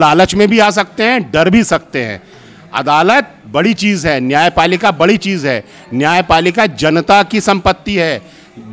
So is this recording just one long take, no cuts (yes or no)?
yes